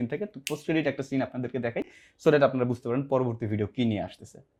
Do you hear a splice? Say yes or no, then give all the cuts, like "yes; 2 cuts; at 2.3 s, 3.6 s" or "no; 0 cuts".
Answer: no; 0 cuts